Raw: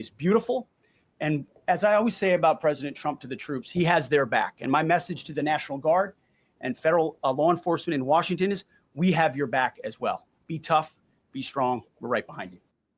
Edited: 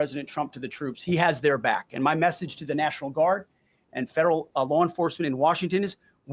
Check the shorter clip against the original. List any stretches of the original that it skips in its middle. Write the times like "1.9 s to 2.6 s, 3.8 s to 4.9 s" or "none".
none